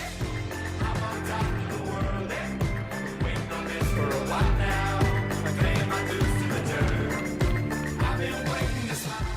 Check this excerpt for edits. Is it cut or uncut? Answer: cut